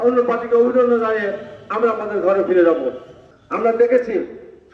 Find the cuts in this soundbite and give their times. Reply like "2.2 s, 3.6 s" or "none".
3.1 s

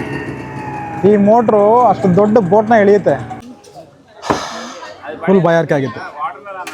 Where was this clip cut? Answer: 3.3 s

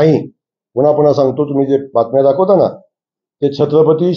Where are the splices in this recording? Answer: none

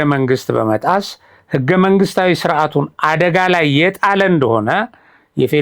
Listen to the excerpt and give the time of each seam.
none

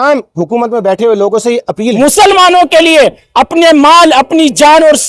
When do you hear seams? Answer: 1.9 s

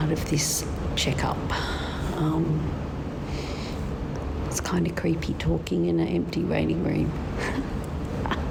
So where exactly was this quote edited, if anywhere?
none

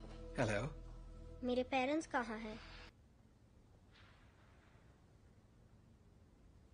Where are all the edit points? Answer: 2.9 s

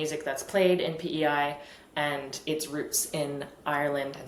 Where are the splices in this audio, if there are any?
none

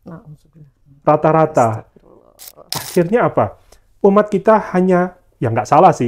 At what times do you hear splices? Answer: 2.7 s

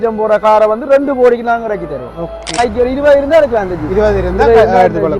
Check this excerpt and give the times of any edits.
2.5 s

